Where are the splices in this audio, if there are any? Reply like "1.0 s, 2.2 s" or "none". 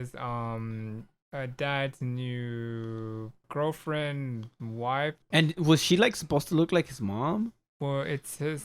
3.5 s, 5.3 s